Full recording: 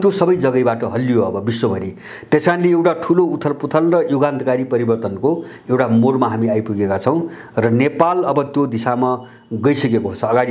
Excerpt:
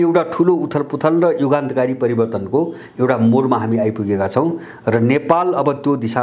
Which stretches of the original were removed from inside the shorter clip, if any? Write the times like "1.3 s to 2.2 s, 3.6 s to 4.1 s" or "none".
none